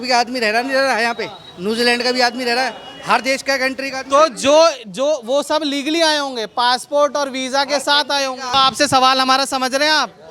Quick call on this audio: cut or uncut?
cut